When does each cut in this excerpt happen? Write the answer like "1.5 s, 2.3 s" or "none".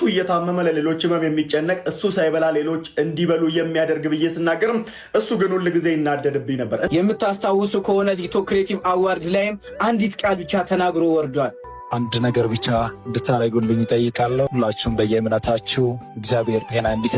6.9 s, 11.6 s, 14.5 s